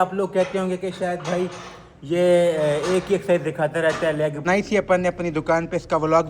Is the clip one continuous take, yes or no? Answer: no